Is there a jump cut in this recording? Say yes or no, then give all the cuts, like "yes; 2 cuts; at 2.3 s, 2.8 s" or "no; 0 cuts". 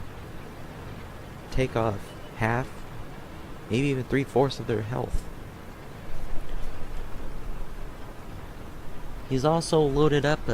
no; 0 cuts